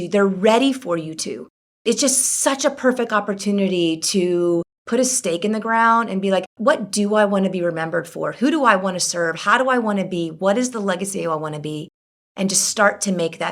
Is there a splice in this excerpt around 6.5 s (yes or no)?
yes